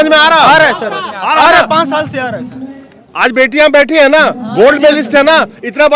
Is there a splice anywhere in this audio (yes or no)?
no